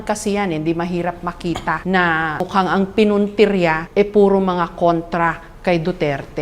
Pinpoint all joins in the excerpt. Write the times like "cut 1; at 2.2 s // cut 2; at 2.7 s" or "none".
cut 1; at 1.8 s // cut 2; at 2.4 s // cut 3; at 3.8 s